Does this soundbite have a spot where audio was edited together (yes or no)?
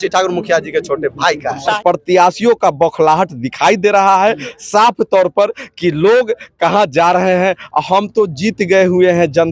yes